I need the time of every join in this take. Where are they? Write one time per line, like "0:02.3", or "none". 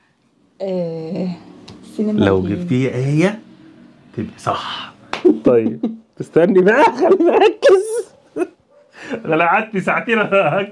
0:05.1